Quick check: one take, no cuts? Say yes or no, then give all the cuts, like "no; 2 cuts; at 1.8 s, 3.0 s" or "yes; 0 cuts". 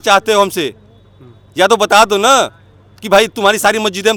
yes; 0 cuts